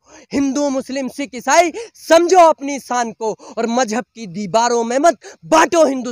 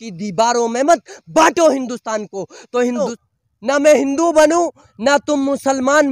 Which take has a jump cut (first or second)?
second